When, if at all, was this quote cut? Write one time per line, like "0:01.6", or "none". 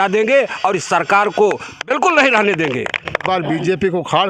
0:03.2